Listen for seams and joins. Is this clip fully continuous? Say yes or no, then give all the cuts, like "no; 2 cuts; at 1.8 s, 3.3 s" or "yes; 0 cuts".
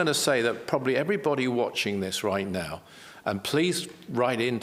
yes; 0 cuts